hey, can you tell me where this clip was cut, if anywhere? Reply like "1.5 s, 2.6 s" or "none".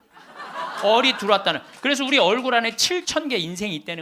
none